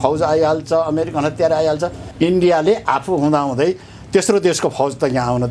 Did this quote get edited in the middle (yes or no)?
yes